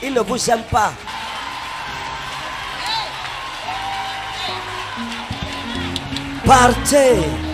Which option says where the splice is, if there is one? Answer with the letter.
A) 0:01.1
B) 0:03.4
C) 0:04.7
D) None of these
A